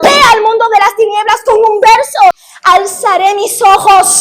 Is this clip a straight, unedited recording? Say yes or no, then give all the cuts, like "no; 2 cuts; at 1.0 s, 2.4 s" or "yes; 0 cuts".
no; 1 cut; at 2.5 s